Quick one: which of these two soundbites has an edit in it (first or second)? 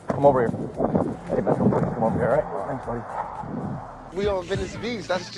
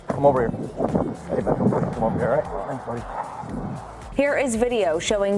first